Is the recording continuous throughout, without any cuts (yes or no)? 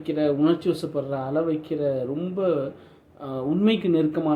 yes